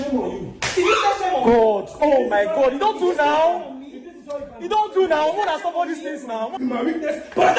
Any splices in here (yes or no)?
no